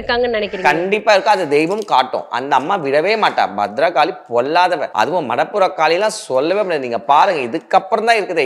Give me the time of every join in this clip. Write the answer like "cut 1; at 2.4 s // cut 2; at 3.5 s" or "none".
cut 1; at 4.9 s